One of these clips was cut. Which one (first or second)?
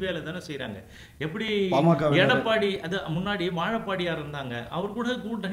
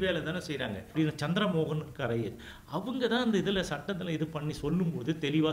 second